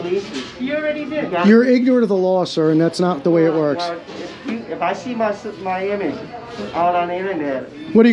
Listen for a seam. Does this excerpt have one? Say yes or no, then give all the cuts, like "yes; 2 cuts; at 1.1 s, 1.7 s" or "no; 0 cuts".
no; 0 cuts